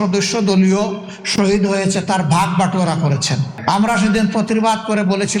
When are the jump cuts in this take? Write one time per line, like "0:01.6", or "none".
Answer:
0:03.6